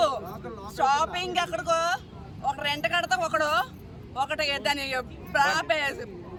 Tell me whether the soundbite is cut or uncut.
uncut